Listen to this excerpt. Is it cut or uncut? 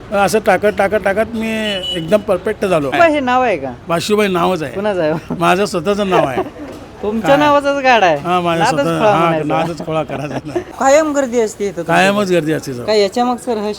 cut